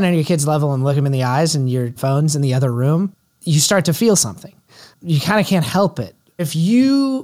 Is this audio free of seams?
no; 4 cuts; at 1.0 s, 1.9 s, 3.3 s, 6.3 s

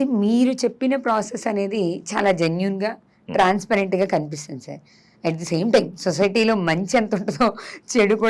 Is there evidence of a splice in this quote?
no; 0 cuts

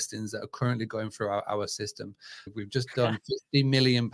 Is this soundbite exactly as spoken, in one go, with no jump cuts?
no; 1 cut; at 2.5 s

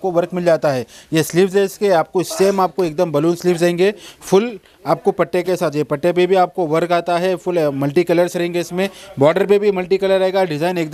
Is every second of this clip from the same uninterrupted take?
yes; 0 cuts

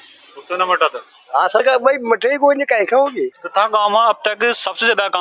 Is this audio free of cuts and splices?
no; 1 cut; at 3.4 s

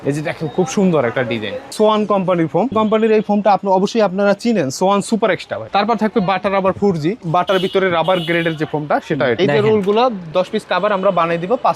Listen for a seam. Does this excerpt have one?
yes; 5 cuts; at 1.7 s, 2.7 s, 5.6 s, 7.2 s, 9.4 s

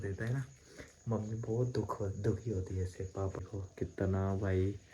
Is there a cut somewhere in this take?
yes; 1 cut; at 3.4 s

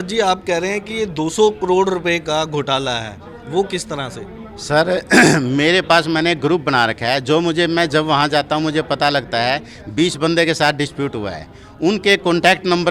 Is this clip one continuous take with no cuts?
yes; 0 cuts

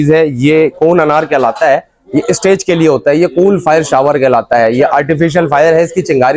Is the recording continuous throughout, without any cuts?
yes; 0 cuts

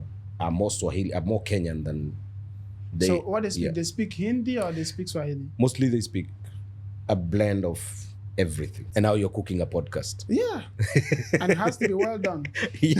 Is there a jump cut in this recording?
yes; 1 cut; at 8.9 s

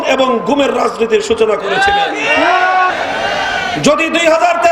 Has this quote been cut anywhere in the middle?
yes; 1 cut; at 2.9 s

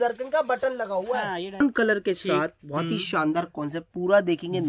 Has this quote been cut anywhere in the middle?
yes; 1 cut; at 1.6 s

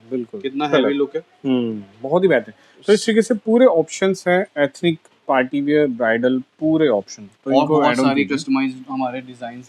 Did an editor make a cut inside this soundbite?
no; 0 cuts

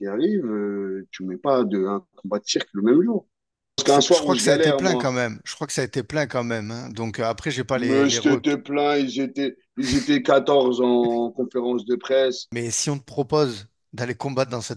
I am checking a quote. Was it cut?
yes; 2 cuts; at 3.8 s, 12.5 s

